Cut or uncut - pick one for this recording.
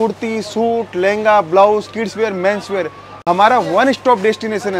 uncut